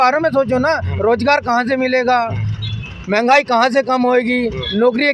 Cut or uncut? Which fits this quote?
uncut